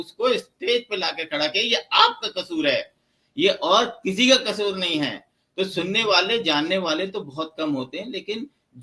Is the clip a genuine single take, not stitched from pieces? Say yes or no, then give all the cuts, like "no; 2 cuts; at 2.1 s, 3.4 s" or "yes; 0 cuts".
yes; 0 cuts